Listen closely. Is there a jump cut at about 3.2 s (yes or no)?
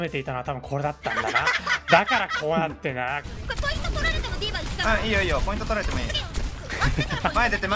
yes